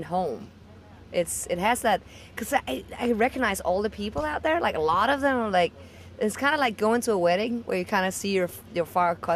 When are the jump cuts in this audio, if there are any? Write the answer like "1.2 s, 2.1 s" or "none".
none